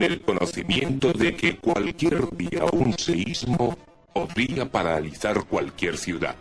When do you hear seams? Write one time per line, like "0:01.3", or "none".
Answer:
none